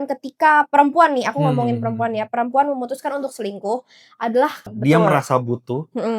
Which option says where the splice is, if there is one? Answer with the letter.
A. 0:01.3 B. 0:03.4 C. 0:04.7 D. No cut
C